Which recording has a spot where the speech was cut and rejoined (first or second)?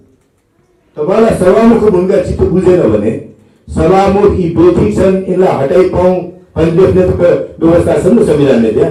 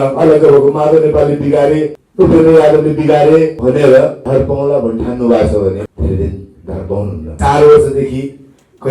second